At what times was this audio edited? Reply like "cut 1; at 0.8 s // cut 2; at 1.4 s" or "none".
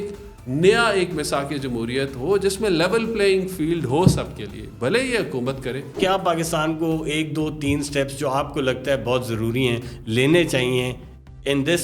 cut 1; at 5.9 s

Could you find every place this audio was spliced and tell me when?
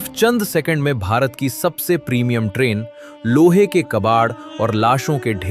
none

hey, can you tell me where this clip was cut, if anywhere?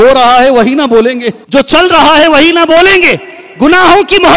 cut 1; at 1.3 s

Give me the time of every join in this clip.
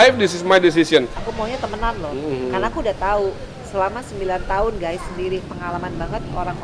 cut 1; at 1.2 s

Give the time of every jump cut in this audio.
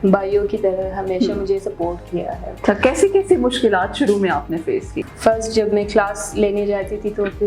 cut 1; at 2.4 s // cut 2; at 5.0 s

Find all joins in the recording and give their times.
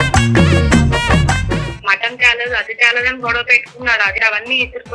cut 1; at 1.7 s // cut 2; at 4.2 s

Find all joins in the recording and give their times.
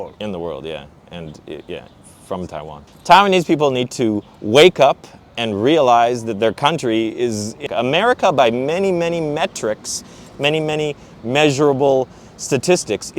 cut 1; at 2.8 s // cut 2; at 7.6 s

